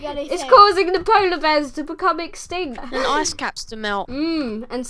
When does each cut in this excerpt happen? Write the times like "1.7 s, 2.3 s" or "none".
2.8 s, 4.1 s